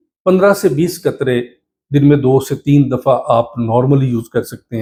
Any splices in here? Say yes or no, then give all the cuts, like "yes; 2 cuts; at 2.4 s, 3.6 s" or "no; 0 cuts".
no; 0 cuts